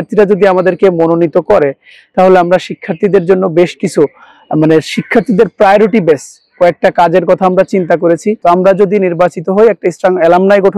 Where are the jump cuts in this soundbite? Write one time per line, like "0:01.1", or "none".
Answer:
0:08.4